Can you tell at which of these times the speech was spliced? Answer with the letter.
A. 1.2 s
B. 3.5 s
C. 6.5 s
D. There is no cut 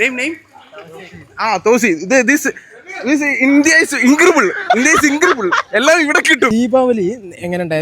C